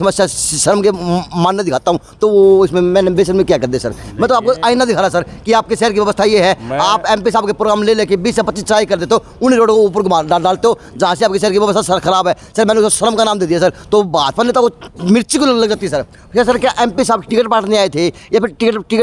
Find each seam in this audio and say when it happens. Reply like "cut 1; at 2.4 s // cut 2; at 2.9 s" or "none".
none